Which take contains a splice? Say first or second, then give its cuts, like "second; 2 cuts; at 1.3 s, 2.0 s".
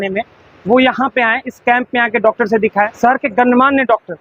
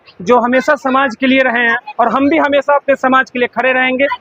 first; 1 cut; at 2.9 s